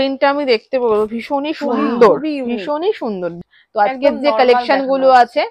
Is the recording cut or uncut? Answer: cut